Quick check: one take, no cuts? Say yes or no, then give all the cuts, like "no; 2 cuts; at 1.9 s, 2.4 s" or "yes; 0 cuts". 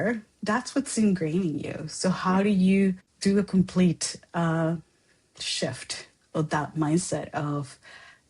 no; 1 cut; at 3.1 s